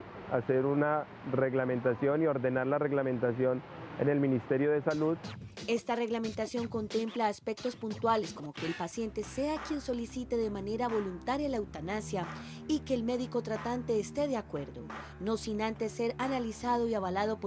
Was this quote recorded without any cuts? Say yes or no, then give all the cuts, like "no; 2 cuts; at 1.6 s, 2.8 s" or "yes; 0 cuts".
yes; 0 cuts